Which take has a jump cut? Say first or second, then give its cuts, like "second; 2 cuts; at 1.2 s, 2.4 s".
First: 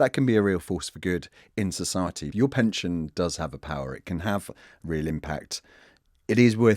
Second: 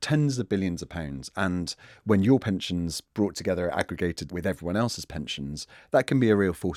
first; 1 cut; at 2.2 s